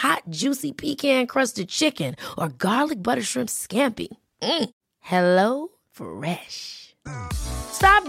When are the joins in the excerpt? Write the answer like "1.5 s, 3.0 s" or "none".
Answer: none

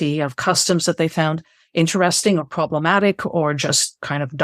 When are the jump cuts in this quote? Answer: none

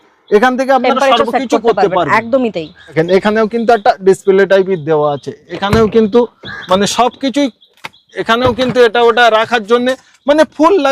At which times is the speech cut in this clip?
2.9 s

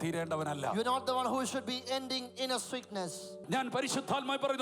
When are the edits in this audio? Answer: 3.4 s

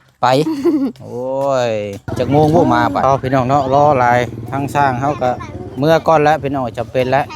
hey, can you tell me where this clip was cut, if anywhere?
3.0 s

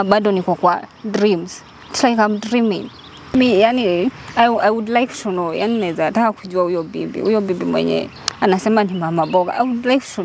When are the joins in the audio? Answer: 3.3 s

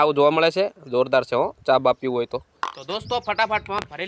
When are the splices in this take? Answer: 2.8 s

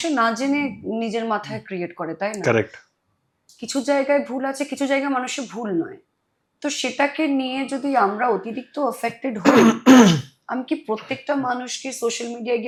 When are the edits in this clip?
none

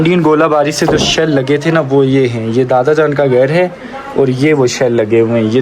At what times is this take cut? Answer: none

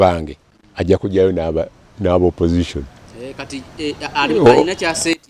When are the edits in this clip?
none

